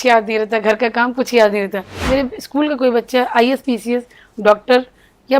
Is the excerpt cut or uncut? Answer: cut